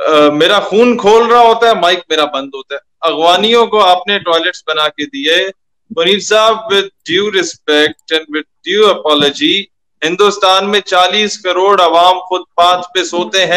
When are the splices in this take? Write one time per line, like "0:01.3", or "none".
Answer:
none